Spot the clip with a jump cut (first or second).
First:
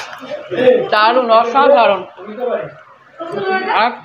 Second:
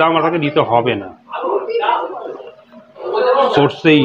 second